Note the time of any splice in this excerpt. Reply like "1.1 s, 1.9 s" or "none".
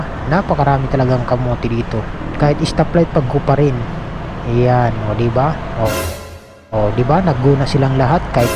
2.2 s